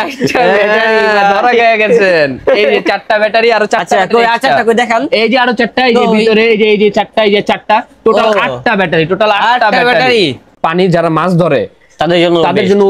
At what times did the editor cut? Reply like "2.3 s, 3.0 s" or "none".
10.5 s